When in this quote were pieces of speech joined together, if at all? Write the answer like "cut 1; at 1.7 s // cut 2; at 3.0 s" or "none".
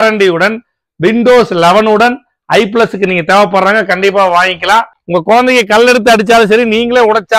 cut 1; at 4.9 s